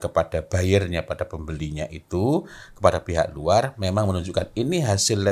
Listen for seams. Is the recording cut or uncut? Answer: uncut